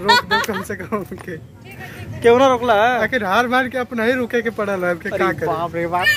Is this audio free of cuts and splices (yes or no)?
yes